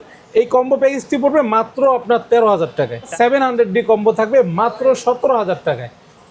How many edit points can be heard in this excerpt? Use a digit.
1